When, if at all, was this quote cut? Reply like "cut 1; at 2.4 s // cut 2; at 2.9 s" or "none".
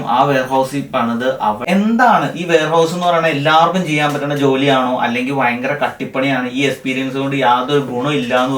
cut 1; at 1.6 s